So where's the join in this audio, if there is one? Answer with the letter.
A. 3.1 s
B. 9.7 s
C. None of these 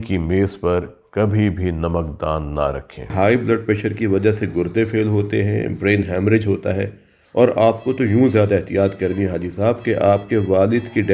A